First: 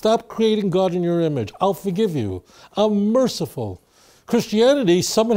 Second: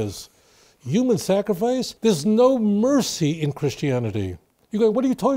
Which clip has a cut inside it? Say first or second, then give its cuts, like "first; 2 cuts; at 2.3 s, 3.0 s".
second; 1 cut; at 1.9 s